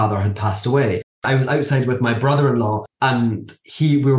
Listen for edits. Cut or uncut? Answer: cut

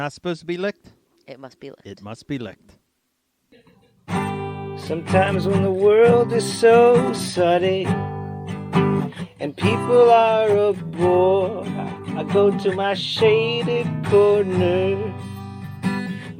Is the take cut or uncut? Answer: cut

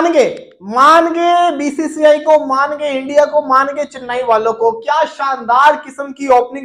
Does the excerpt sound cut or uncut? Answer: uncut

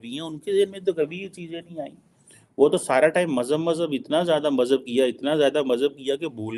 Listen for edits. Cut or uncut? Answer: uncut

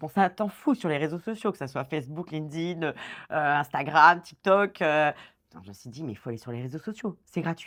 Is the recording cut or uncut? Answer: uncut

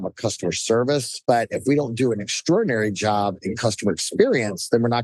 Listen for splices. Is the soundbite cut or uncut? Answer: cut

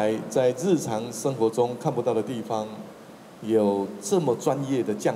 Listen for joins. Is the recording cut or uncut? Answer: uncut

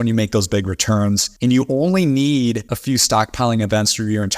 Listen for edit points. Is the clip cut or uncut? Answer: cut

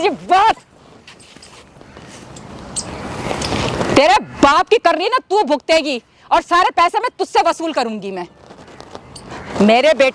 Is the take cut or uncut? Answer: uncut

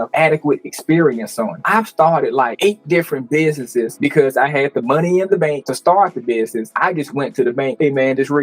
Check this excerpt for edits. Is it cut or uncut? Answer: cut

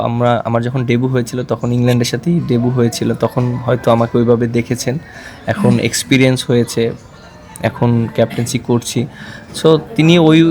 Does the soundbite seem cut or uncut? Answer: uncut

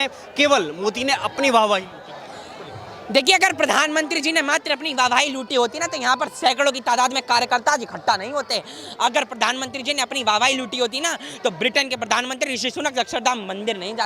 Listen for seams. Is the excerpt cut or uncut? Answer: uncut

